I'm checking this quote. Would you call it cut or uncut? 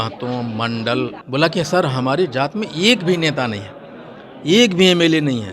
cut